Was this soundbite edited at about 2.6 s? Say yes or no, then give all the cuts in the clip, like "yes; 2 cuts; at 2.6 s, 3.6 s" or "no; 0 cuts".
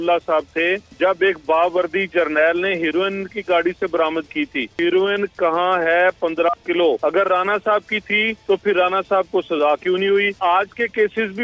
no; 5 cuts; at 0.9 s, 4.8 s, 7.0 s, 8.3 s, 10.4 s